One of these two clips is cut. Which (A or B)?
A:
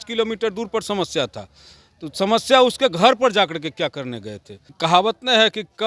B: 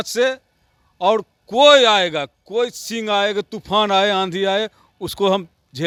A